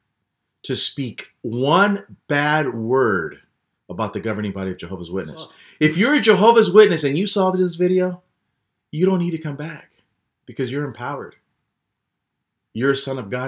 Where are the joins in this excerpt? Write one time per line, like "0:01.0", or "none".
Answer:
0:05.6

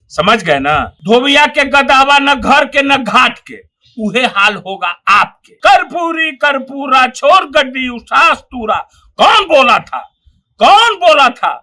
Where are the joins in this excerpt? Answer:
0:00.9
0:05.4

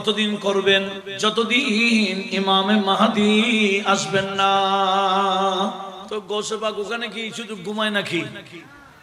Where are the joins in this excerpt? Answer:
0:01.0
0:06.0

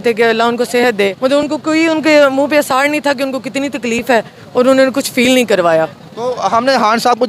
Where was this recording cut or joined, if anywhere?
none

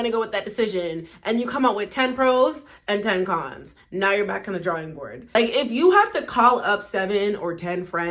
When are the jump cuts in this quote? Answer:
0:05.3

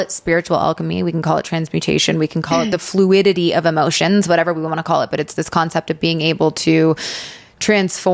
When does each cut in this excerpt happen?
none

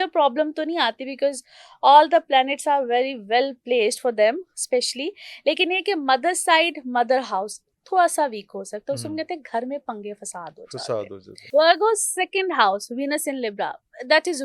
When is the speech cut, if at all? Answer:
0:11.3

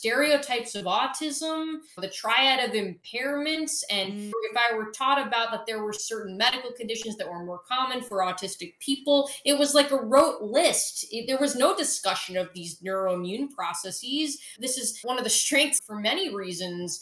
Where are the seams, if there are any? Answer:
0:01.9
0:04.3
0:14.5

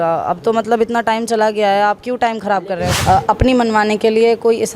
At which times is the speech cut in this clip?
0:02.9

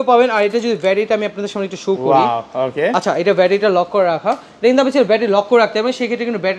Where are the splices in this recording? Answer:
none

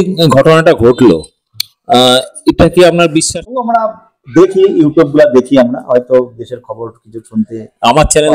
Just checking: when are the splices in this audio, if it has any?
0:03.3

